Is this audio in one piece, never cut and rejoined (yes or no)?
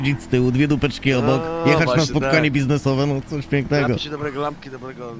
yes